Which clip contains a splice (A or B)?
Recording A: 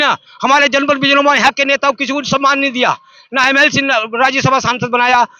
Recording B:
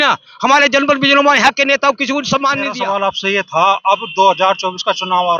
B